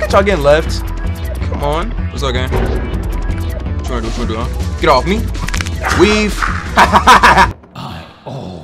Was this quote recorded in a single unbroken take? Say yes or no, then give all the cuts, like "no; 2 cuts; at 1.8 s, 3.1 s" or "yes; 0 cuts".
no; 1 cut; at 7.6 s